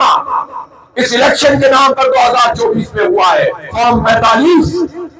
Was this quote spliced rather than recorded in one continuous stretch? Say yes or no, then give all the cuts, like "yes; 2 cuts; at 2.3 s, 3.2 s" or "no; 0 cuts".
yes; 1 cut; at 3.6 s